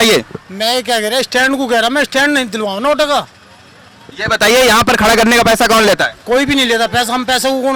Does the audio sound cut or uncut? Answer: uncut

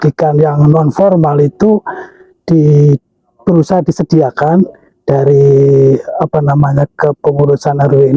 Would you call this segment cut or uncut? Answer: uncut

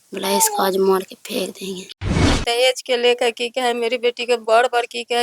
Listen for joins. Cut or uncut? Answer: cut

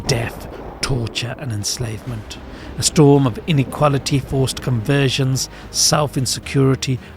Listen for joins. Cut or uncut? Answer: cut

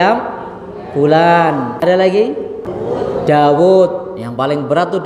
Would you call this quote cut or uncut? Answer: cut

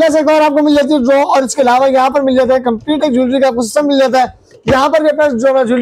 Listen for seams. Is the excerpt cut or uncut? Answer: uncut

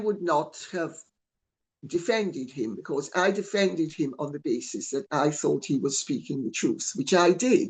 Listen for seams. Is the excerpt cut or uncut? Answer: uncut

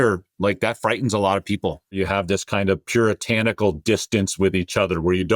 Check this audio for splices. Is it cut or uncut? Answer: cut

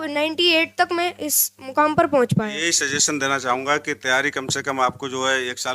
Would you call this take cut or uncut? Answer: cut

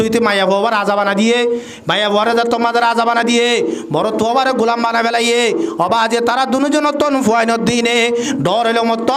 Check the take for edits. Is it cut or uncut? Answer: uncut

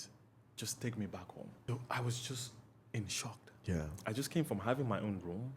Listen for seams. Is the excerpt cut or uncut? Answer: cut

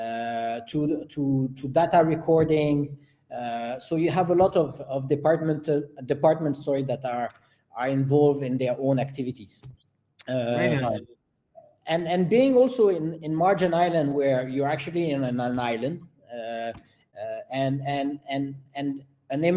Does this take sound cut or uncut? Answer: uncut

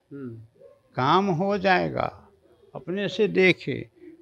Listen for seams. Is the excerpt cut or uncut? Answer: uncut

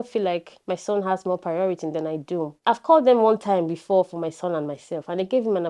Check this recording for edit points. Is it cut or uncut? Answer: cut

